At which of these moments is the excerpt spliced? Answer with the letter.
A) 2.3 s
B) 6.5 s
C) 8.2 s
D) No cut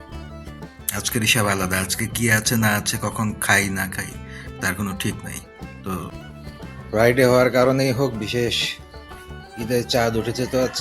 B